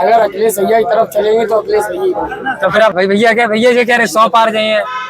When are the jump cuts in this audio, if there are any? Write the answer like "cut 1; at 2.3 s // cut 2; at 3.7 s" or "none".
cut 1; at 2.9 s